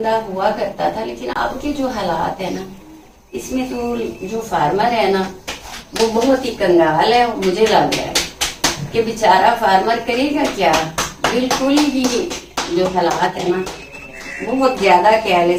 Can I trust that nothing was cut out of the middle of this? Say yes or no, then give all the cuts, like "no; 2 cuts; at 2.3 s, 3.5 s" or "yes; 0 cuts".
yes; 0 cuts